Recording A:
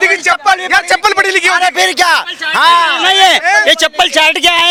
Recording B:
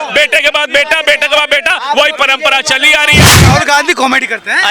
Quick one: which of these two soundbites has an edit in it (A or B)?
B